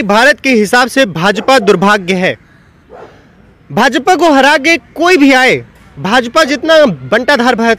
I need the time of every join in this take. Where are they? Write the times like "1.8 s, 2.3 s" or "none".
none